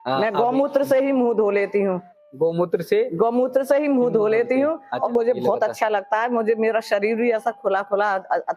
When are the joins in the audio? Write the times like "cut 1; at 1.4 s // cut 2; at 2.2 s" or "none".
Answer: cut 1; at 5.1 s